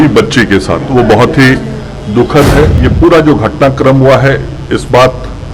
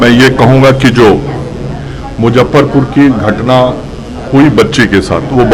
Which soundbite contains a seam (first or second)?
first